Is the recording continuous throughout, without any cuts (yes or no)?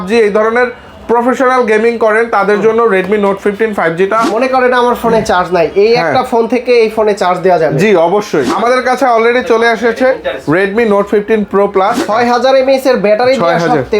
no